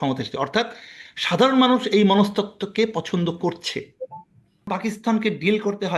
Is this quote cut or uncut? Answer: cut